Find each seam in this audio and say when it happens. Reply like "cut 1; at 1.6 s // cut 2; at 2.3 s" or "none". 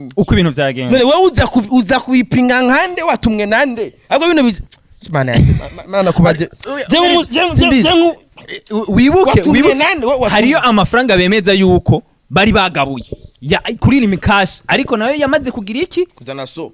none